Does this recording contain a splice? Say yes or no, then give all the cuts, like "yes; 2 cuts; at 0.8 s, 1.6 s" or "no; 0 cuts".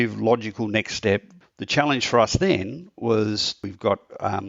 yes; 2 cuts; at 1.4 s, 3.6 s